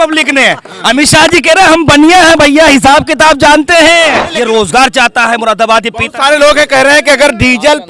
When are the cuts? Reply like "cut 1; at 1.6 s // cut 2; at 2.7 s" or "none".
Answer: cut 1; at 4.2 s

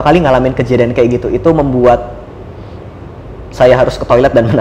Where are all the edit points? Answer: none

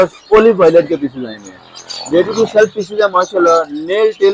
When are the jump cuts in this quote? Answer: none

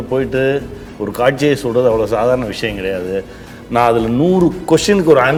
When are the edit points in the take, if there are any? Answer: none

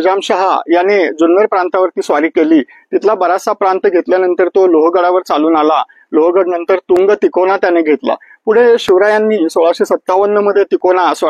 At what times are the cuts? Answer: none

